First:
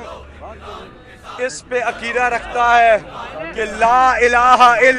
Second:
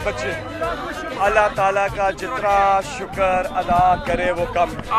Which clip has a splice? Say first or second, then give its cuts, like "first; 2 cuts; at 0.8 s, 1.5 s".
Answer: second; 1 cut; at 1.0 s